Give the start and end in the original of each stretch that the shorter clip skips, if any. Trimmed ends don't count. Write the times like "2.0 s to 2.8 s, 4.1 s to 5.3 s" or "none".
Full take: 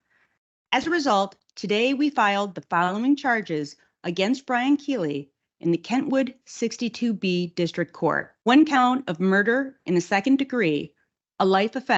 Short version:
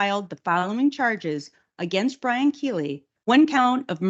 5.4 s to 8.3 s